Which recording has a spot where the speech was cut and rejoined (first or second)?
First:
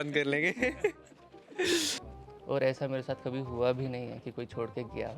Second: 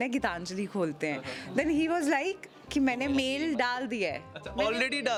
first